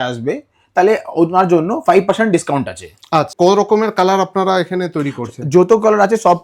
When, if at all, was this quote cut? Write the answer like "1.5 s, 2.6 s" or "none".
3.3 s